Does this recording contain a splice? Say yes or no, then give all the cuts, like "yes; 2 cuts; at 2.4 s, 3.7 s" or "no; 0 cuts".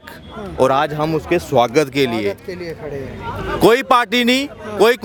no; 0 cuts